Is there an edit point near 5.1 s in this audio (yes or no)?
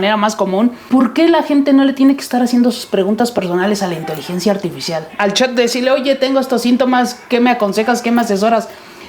yes